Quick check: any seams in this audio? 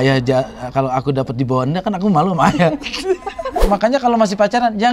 yes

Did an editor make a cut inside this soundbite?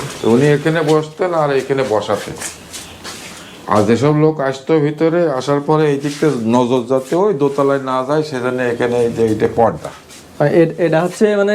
no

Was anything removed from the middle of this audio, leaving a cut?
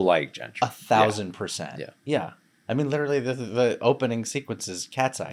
no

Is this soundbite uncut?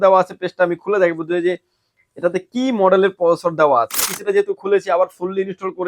no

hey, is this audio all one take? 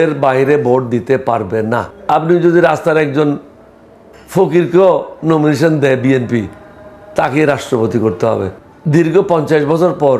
no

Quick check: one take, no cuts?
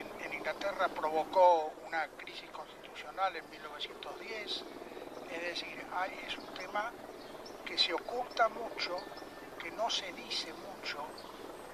yes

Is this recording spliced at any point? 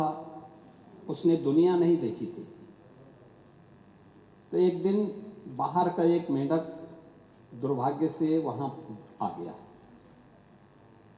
no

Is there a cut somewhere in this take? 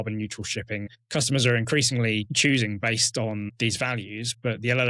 yes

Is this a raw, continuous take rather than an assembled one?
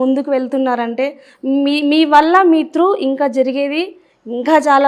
yes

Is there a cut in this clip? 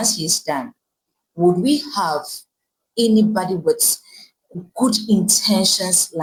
no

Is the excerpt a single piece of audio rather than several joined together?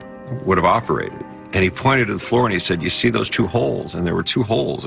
yes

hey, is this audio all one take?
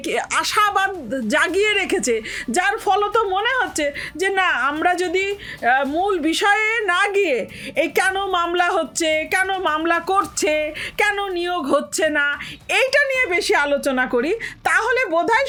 yes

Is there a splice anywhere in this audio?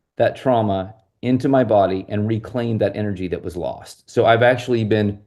no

